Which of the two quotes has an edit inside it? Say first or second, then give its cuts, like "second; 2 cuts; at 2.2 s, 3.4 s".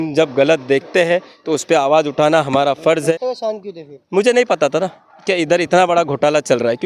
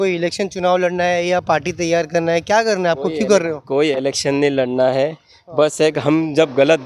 first; 1 cut; at 3.1 s